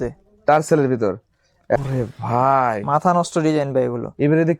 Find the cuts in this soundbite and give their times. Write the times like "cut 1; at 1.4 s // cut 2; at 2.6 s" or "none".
cut 1; at 1.8 s